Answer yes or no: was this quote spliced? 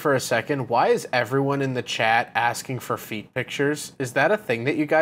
no